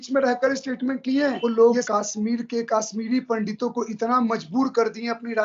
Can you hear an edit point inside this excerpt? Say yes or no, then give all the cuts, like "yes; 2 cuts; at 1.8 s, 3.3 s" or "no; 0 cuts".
yes; 1 cut; at 1.4 s